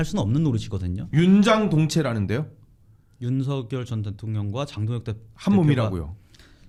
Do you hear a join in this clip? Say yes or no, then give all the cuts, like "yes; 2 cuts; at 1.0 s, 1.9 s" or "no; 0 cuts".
no; 0 cuts